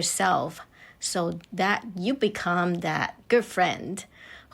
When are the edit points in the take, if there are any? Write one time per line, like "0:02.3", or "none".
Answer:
0:03.2

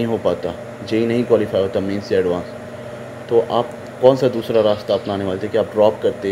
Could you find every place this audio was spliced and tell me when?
none

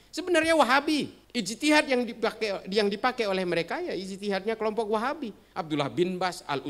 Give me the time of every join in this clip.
0:01.2

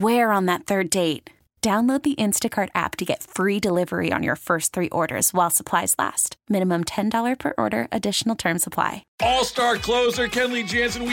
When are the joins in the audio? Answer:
0:09.0

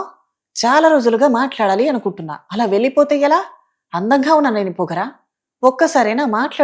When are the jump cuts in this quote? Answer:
none

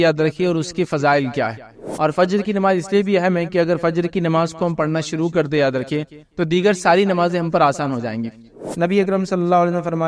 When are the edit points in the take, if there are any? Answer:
0:01.8
0:08.6

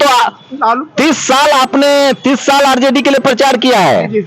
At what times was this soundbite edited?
none

